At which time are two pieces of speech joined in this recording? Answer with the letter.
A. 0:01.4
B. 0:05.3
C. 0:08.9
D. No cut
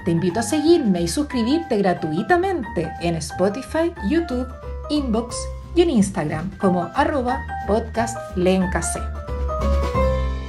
C